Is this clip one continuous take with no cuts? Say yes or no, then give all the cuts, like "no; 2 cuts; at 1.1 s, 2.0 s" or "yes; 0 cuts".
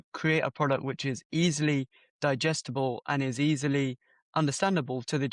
yes; 0 cuts